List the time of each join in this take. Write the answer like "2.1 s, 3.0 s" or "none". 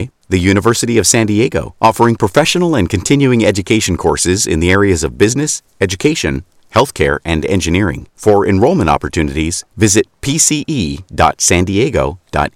none